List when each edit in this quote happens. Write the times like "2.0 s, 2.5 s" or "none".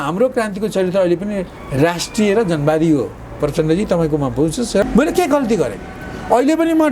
4.8 s